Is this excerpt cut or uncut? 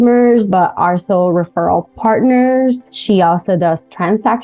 cut